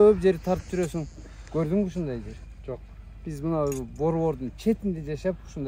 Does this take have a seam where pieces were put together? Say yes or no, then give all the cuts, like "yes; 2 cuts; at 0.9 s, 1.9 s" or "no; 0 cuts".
no; 0 cuts